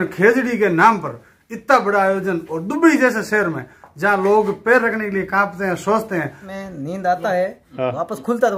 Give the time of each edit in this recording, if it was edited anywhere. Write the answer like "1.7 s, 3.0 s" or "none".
6.5 s

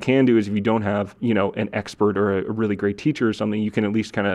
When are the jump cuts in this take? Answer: 1.2 s

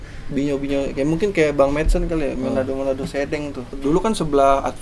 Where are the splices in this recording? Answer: 3.8 s

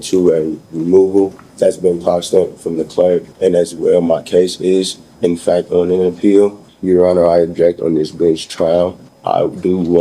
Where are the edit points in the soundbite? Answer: 1.4 s, 3.3 s, 6.7 s, 9.1 s

